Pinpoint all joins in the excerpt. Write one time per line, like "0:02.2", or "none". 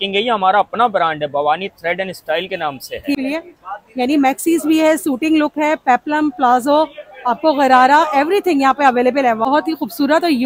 0:03.2
0:09.5